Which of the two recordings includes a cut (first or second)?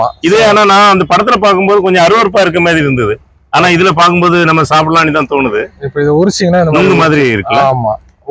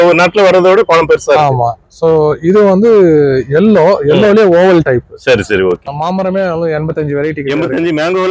second